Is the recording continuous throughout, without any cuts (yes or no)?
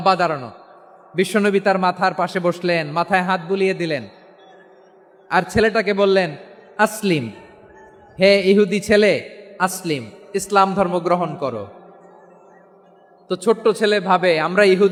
yes